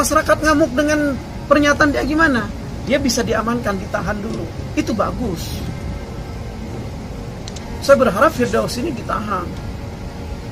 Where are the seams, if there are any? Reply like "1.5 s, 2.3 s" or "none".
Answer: none